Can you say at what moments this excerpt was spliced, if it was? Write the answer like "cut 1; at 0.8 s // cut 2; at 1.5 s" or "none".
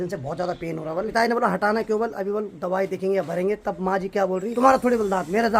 cut 1; at 1.1 s // cut 2; at 4.5 s